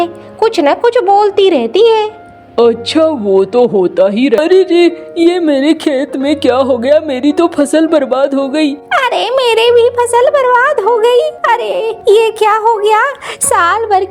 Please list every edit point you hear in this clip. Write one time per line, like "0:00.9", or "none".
0:04.4